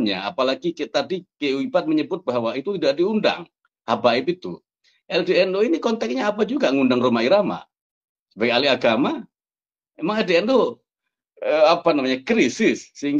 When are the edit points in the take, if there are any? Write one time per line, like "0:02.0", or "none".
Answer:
none